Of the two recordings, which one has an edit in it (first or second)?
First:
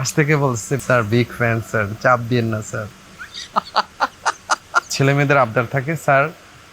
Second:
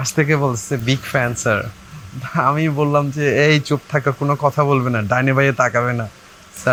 first